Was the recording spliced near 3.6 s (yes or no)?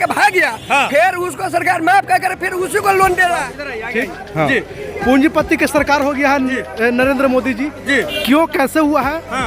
yes